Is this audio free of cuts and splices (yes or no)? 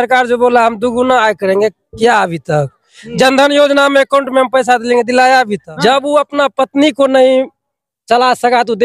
no